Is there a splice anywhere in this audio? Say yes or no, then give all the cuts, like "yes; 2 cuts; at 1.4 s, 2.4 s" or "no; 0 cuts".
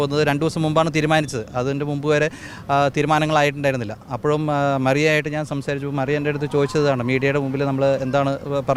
no; 0 cuts